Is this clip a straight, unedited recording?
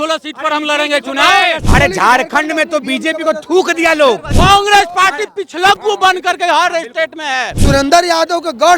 no; 3 cuts; at 1.6 s, 4.3 s, 7.5 s

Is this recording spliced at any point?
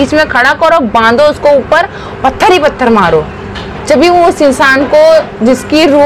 no; 0 cuts

